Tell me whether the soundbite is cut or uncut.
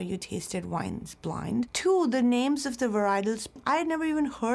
cut